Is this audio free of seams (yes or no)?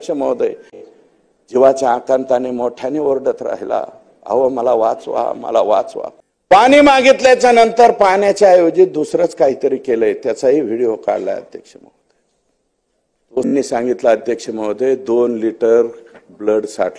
no